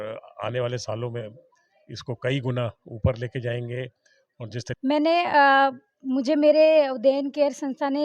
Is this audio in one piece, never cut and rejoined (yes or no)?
no